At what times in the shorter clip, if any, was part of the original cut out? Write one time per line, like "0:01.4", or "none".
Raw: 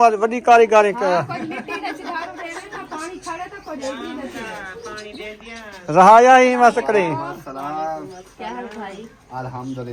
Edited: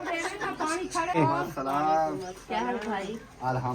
0:01.2